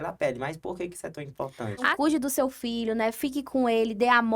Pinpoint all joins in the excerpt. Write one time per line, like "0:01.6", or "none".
0:01.9